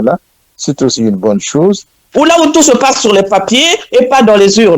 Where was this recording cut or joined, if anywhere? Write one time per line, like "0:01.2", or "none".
0:02.0